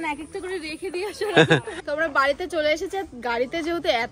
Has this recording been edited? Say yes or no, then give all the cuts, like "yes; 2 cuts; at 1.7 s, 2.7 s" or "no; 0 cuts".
yes; 1 cut; at 1.7 s